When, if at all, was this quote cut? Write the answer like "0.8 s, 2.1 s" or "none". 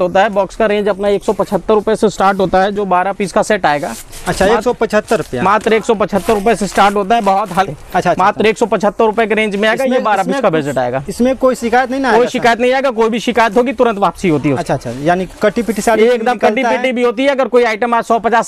none